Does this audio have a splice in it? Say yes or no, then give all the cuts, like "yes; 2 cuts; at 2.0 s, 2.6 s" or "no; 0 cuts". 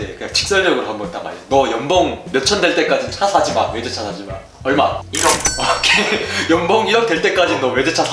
no; 0 cuts